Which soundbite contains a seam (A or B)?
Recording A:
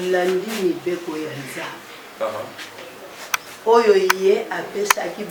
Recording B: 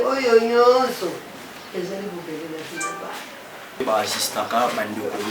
B